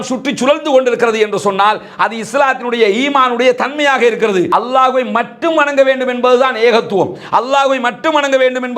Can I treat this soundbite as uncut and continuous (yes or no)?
no